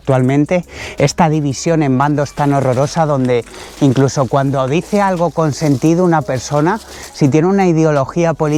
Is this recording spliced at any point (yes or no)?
no